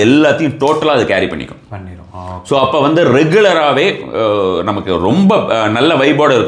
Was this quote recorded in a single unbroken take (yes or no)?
yes